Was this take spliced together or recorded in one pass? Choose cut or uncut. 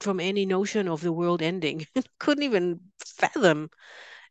uncut